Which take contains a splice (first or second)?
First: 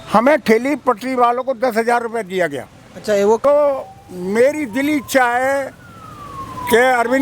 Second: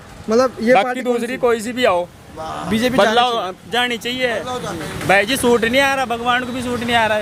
first